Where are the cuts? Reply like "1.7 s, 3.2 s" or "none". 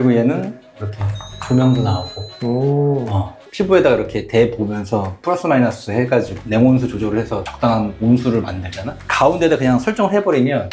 3.4 s, 9.0 s